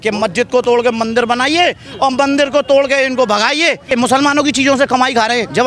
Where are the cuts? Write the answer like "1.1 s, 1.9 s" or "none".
3.9 s